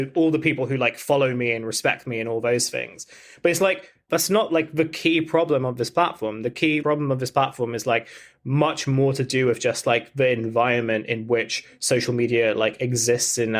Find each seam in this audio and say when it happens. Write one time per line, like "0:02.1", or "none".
none

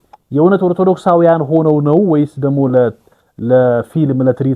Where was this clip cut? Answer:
none

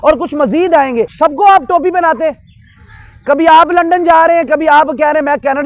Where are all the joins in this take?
0:01.1

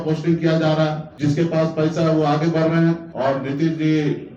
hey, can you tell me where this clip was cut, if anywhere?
0:01.1
0:03.1

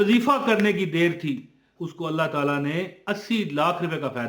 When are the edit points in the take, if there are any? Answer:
0:01.7

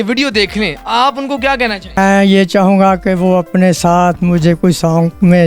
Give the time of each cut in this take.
0:02.0

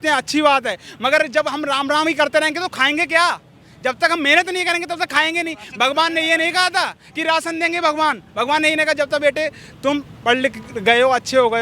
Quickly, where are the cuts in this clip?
none

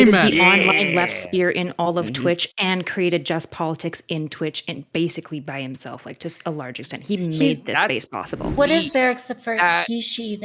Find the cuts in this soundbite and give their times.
0:08.5

